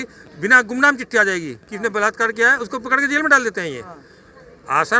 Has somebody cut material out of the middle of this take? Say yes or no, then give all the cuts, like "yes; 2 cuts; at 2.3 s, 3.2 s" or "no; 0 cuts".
no; 0 cuts